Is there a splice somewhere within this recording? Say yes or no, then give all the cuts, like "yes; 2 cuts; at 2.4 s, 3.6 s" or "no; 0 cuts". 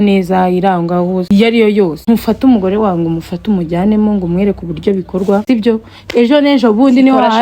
yes; 3 cuts; at 1.3 s, 2.0 s, 5.4 s